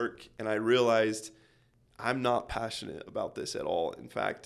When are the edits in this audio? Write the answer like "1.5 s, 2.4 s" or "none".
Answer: none